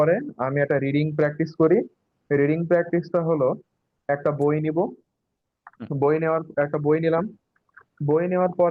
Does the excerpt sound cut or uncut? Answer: uncut